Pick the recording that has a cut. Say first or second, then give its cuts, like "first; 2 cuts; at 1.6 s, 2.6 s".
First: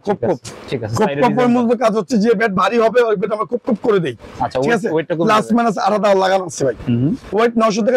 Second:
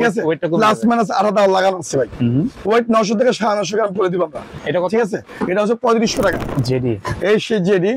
second; 2 cuts; at 4.5 s, 6.5 s